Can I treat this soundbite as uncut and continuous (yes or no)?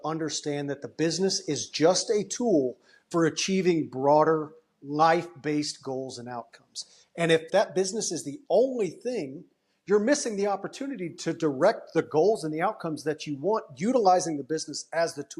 no